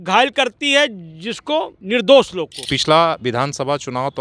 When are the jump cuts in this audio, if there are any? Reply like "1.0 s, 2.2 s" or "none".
1.8 s, 2.7 s